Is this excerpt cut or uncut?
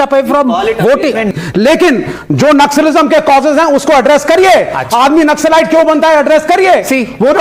cut